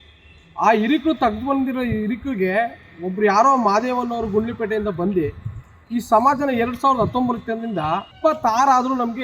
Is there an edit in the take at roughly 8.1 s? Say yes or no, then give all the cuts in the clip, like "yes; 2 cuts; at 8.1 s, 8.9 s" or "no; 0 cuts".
yes; 1 cut; at 8.1 s